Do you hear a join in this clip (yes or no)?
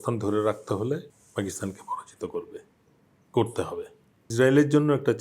yes